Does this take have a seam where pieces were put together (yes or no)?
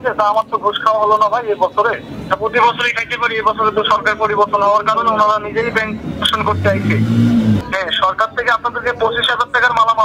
yes